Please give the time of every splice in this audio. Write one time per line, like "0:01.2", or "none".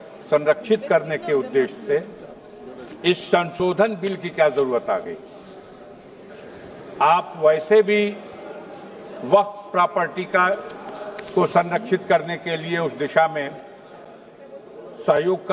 none